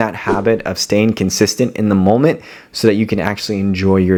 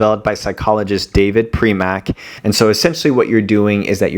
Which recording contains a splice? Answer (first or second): second